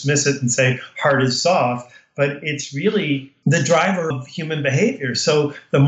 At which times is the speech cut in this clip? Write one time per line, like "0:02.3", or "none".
0:03.3
0:04.1

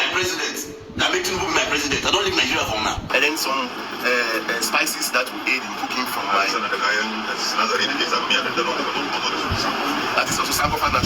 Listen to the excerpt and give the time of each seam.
0:03.1

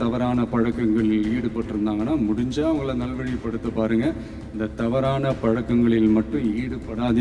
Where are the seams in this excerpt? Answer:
none

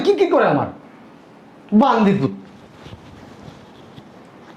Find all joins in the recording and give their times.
none

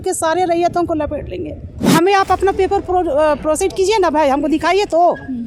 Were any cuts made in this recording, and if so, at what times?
0:01.8

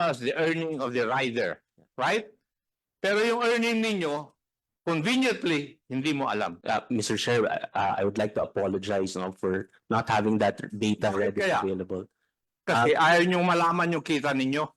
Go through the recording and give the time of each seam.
0:06.6

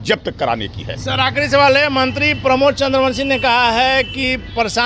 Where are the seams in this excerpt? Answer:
none

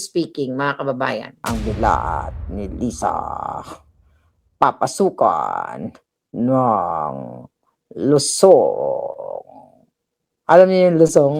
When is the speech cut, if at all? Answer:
0:01.3

